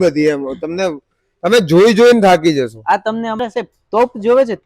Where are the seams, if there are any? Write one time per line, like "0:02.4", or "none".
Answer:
0:03.4